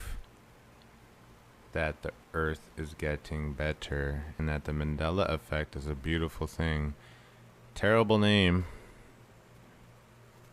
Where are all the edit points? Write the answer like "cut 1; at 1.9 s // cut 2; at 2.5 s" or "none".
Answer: cut 1; at 3.8 s